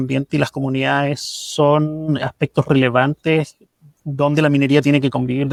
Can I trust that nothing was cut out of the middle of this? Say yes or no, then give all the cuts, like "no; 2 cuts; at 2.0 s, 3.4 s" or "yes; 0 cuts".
yes; 0 cuts